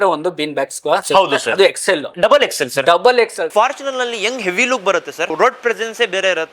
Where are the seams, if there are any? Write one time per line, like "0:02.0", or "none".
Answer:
0:02.1
0:03.4
0:05.3

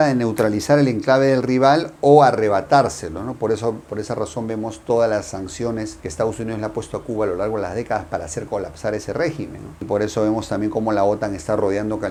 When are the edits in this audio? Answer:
none

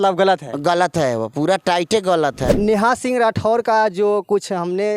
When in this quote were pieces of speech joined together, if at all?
0:02.5

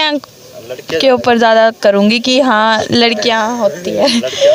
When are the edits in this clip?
none

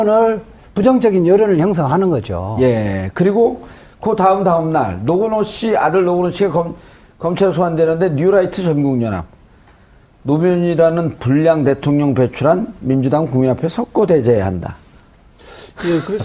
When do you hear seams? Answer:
none

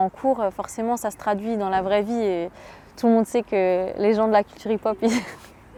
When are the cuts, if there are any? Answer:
none

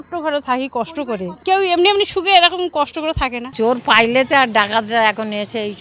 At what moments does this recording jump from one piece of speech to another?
0:01.3
0:03.4

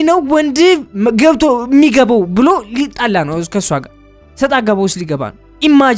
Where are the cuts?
none

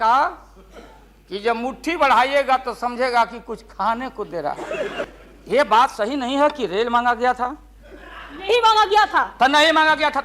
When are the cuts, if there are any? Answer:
0:05.1

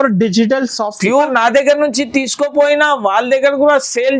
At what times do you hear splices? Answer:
0:01.3

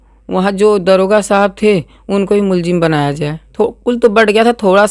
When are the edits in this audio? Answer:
0:03.4

